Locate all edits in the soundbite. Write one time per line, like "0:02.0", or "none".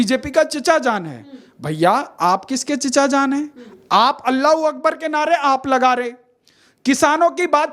none

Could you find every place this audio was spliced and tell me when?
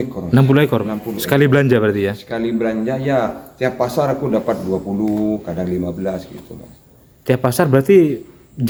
none

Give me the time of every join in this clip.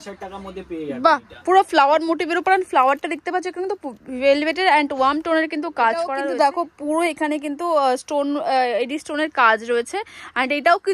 0:06.2

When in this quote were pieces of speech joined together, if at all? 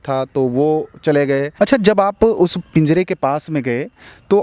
0:01.5

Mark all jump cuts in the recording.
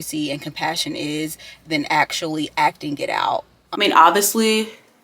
0:03.6

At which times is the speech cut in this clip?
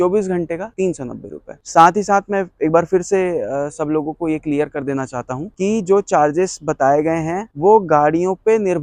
none

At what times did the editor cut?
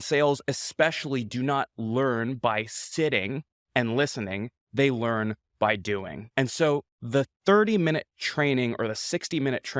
0:06.2
0:06.9

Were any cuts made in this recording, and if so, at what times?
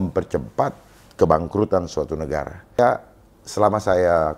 0:02.8

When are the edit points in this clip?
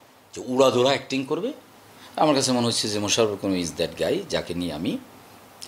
none

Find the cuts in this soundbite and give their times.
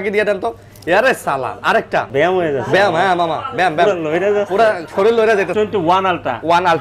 0:02.1
0:05.5

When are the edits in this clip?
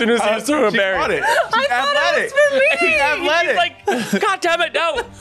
none

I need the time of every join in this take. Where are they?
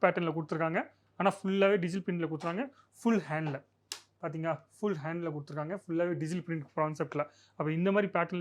none

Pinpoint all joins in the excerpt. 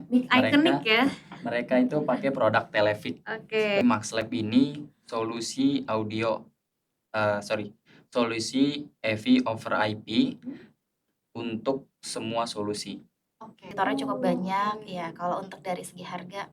0:03.8
0:13.7

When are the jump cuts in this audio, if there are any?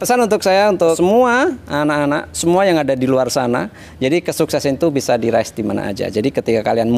none

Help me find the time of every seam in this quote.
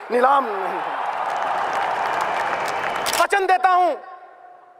0:03.2

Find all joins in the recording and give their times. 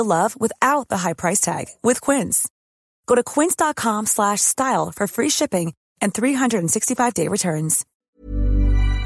0:08.1

